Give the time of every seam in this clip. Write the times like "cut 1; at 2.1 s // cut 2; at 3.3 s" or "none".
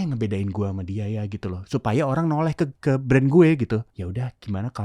cut 1; at 2.8 s // cut 2; at 3.9 s